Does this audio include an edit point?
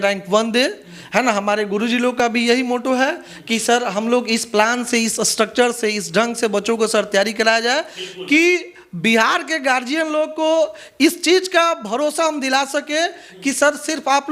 no; 0 cuts

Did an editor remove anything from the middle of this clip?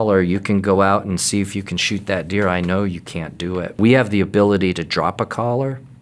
yes; 1 cut; at 3.8 s

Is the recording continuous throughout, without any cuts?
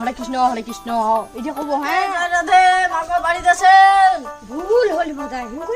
no; 1 cut; at 1.9 s

